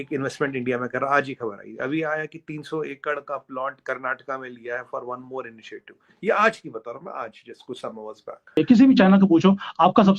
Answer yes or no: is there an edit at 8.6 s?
yes